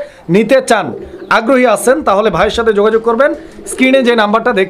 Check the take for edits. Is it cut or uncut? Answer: uncut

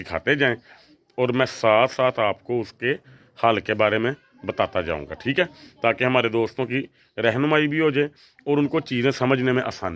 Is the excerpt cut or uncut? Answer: uncut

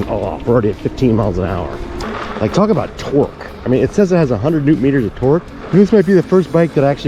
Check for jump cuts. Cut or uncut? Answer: cut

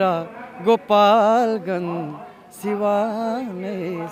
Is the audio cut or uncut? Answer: uncut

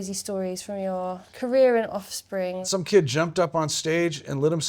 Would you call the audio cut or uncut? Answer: cut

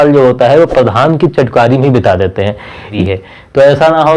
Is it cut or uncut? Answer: cut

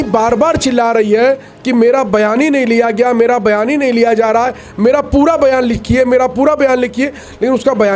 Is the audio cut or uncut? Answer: uncut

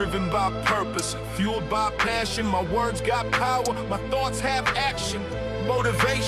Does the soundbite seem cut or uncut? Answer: uncut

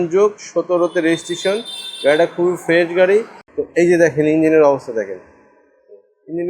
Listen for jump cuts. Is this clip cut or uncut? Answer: cut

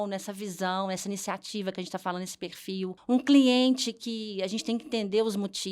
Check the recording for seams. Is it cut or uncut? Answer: cut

